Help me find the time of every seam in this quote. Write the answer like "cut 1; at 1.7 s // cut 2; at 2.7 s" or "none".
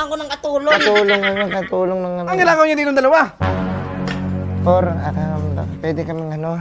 none